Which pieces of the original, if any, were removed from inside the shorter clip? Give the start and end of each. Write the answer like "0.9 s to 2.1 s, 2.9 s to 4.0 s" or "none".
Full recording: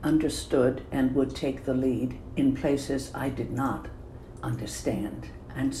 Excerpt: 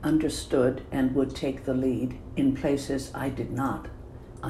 none